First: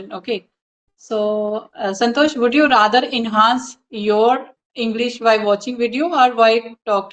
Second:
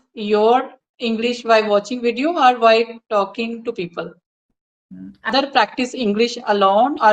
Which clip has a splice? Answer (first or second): second